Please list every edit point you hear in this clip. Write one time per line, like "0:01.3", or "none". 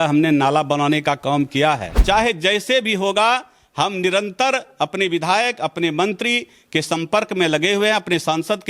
0:01.9